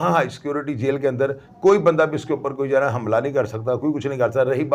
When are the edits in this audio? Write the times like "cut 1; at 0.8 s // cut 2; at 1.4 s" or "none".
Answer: none